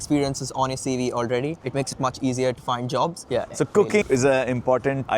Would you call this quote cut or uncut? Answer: cut